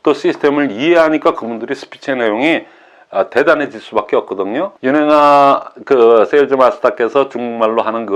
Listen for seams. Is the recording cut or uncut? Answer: cut